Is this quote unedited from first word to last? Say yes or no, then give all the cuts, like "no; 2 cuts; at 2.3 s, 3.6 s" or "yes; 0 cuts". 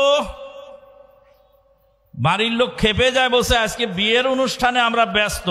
yes; 0 cuts